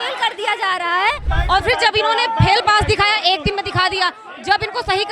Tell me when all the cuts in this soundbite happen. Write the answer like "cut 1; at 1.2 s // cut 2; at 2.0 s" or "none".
cut 1; at 1.3 s